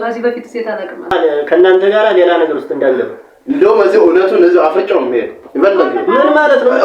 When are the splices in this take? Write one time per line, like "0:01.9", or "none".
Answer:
0:01.1